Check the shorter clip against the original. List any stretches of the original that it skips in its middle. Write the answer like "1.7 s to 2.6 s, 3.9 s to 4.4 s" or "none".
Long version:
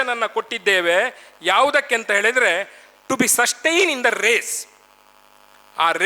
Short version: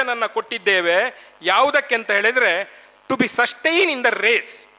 none